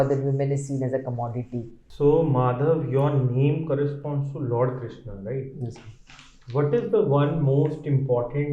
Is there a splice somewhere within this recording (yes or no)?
yes